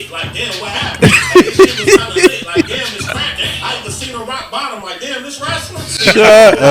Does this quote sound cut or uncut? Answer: uncut